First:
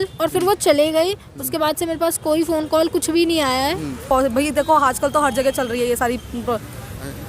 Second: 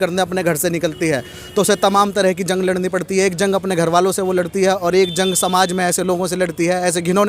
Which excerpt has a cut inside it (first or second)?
first